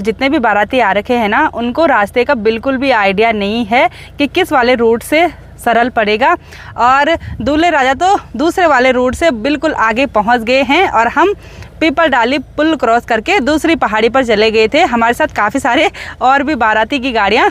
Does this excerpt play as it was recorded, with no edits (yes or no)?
yes